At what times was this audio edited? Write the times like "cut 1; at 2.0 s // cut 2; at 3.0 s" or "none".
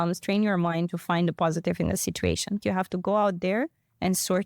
cut 1; at 2.6 s